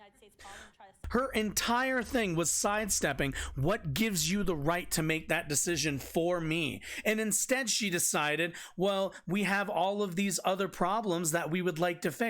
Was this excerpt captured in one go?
no; 1 cut; at 0.9 s

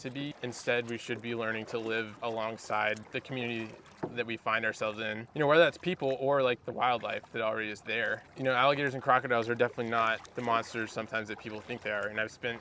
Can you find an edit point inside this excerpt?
yes; 5 cuts; at 2.1 s, 3.0 s, 5.2 s, 8.2 s, 10.3 s

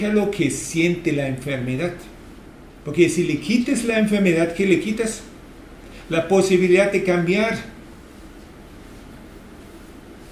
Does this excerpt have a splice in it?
no; 0 cuts

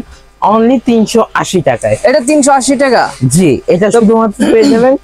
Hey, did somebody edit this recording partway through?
no; 0 cuts

